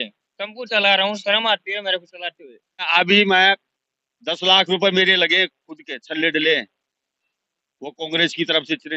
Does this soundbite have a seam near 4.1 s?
no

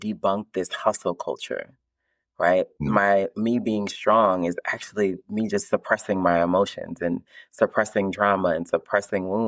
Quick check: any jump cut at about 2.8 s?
yes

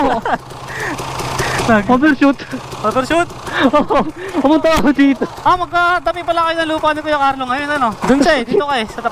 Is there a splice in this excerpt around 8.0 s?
yes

